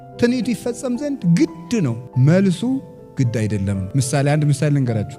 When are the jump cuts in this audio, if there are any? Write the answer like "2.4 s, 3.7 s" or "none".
none